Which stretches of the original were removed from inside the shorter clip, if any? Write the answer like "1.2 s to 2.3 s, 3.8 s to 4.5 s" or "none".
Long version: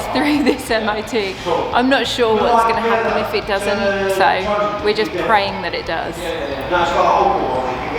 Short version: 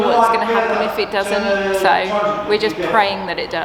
none

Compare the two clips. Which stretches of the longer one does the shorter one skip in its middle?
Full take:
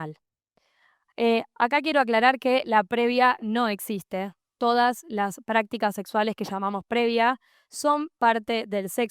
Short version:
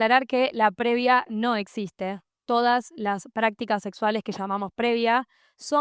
none

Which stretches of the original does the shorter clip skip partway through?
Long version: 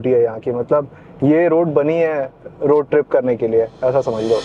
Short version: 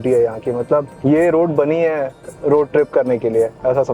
0.9 s to 1.1 s

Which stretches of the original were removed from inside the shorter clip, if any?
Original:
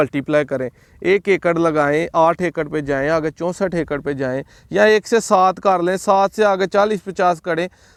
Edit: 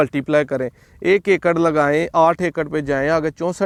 none

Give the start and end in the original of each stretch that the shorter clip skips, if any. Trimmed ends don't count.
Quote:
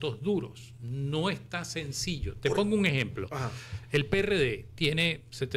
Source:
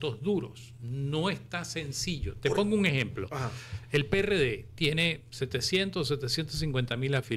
none

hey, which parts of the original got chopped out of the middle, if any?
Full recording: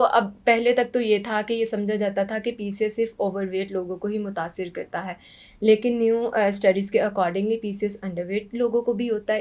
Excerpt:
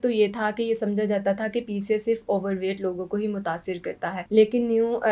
5.1 s to 5.5 s

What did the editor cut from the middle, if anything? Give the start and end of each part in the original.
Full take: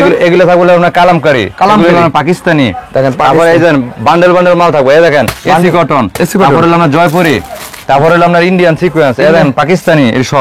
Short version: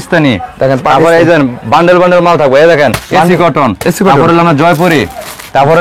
none

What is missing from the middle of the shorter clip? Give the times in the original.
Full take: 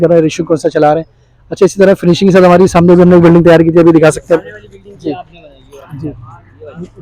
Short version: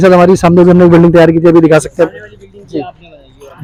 none

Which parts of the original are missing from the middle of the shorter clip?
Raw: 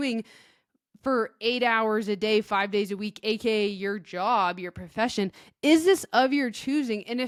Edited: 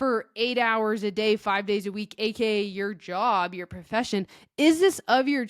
none

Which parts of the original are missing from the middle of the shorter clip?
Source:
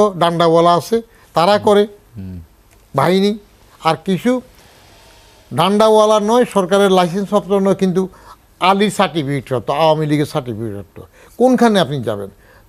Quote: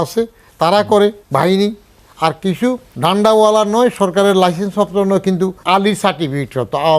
2.0 s to 2.8 s, 4.5 s to 5.4 s, 8.1 s to 8.5 s

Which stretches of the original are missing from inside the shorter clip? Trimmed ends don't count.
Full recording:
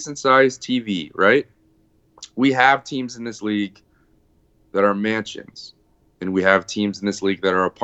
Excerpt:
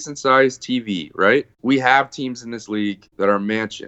1.5 s to 2.3 s, 3.8 s to 4.6 s

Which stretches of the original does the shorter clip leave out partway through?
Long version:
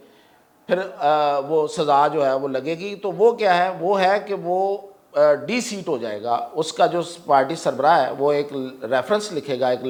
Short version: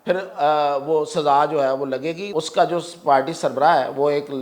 2.9 s to 6.5 s

